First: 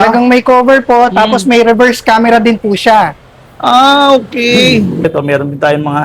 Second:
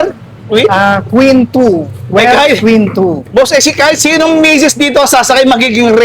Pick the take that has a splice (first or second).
first